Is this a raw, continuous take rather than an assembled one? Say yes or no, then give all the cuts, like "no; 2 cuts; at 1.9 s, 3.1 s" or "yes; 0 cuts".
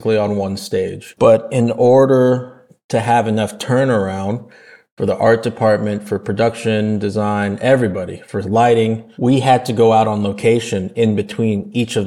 yes; 0 cuts